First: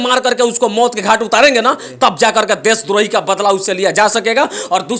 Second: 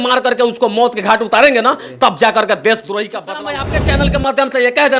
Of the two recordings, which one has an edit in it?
second; 1 cut; at 3.6 s

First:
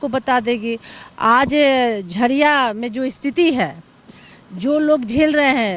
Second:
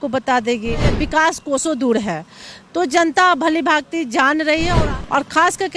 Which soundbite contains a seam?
second; 2 cuts; at 0.9 s, 4.8 s

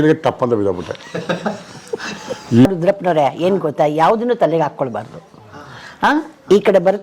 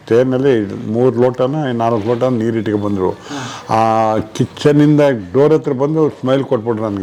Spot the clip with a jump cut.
first; 1 cut; at 2.7 s

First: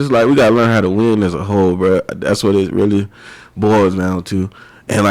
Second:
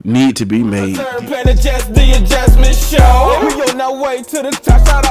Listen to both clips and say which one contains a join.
second; 1 cut; at 1.0 s

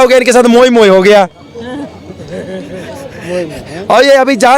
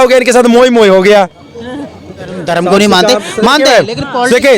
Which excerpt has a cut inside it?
second; 1 cut; at 2.4 s

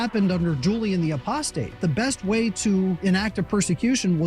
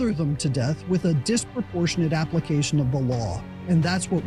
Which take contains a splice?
first; 2 cuts; at 1.8 s, 3.0 s

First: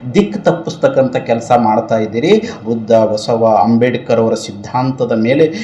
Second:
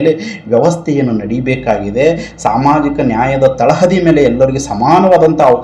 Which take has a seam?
first; 1 cut; at 2.5 s

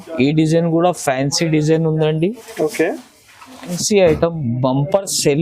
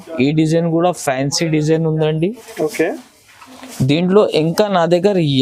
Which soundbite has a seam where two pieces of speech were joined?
first; 1 cut; at 3.8 s

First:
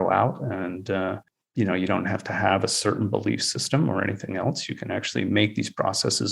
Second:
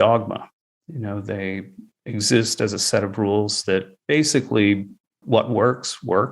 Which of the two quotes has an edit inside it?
second; 3 cuts; at 1.8 s, 3.9 s, 5.1 s

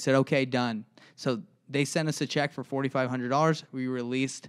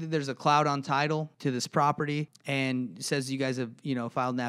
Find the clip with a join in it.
second; 2 cuts; at 1.3 s, 2.4 s

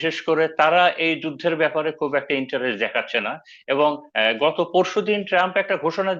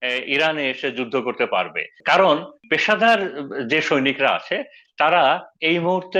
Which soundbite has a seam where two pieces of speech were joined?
second; 2 cuts; at 1.9 s, 2.6 s

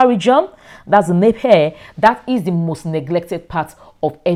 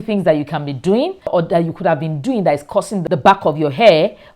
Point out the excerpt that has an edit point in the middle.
second; 2 cuts; at 1.3 s, 3.0 s

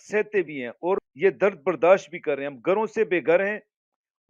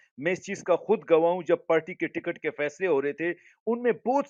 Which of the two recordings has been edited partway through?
first; 1 cut; at 1.1 s

